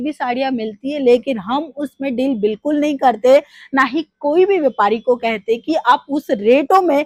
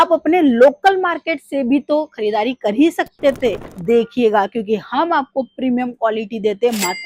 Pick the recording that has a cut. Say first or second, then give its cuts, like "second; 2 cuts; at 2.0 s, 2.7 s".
second; 1 cut; at 3.7 s